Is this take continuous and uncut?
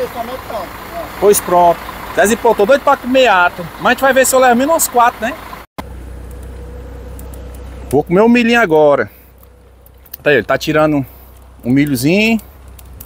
no; 1 cut; at 5.8 s

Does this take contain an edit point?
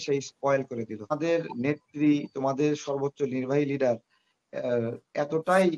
yes; 1 cut; at 1.1 s

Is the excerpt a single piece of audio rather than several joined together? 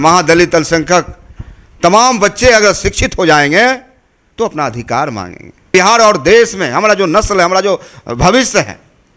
no; 1 cut; at 5.7 s

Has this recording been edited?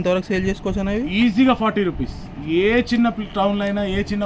no; 0 cuts

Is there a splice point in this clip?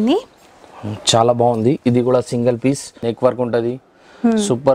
yes; 1 cut; at 3.0 s

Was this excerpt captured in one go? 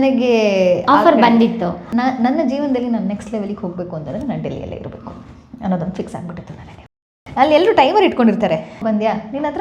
no; 2 cuts; at 1.9 s, 7.2 s

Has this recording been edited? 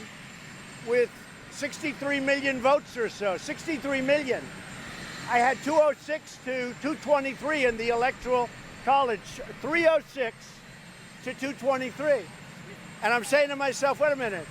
yes; 1 cut; at 3.8 s

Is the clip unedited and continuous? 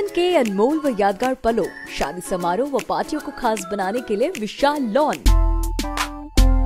no; 1 cut; at 5.3 s

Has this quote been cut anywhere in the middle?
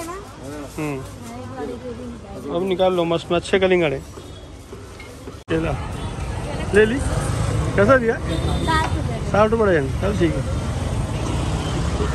no; 0 cuts

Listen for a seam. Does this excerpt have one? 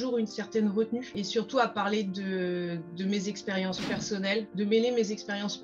yes; 2 cuts; at 1.2 s, 4.5 s

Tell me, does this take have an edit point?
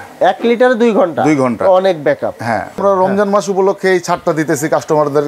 yes; 1 cut; at 2.7 s

